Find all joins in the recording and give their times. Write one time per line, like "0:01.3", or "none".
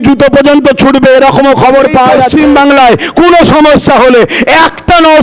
0:02.2